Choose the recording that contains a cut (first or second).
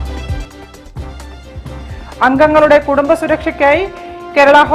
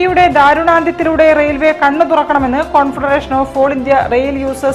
first